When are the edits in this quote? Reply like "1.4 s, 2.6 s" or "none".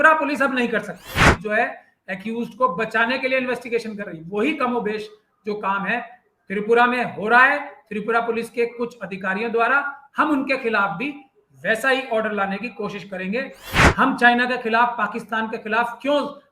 1.1 s, 13.8 s